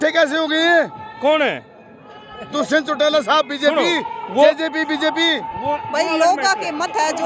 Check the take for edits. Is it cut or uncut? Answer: uncut